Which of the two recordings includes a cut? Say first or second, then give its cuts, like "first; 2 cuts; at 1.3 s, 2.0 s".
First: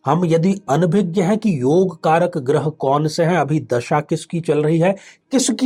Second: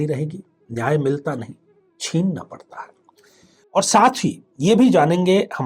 second; 1 cut; at 3.5 s